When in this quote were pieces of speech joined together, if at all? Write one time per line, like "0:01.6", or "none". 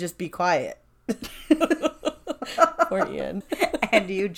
0:03.4